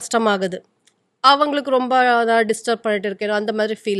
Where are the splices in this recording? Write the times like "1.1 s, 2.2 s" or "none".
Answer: none